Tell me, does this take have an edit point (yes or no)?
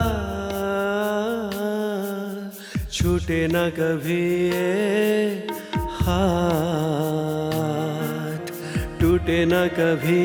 no